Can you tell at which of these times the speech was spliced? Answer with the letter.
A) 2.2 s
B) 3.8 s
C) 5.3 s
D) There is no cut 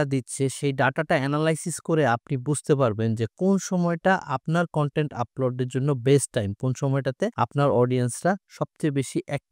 D